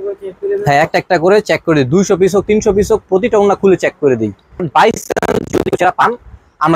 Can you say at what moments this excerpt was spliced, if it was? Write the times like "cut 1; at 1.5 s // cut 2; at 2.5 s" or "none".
cut 1; at 4.7 s